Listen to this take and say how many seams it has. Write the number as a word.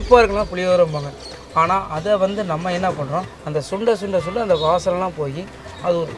one